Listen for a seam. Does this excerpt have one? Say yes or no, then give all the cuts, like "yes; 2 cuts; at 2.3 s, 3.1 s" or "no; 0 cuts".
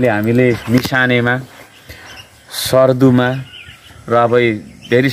no; 0 cuts